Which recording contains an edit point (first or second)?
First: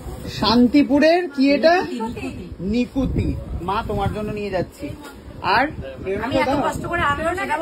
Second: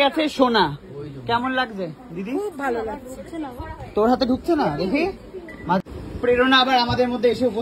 second